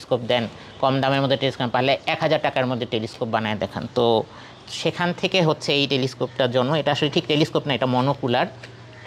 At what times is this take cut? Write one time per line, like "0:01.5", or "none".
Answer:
none